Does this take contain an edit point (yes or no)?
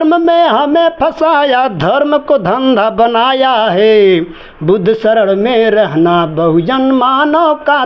no